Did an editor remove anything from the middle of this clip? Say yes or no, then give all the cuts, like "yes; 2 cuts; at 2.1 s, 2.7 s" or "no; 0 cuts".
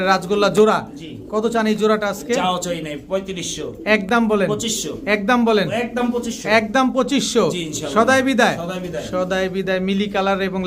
no; 0 cuts